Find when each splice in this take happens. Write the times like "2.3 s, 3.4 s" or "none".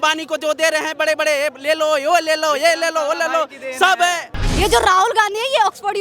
4.3 s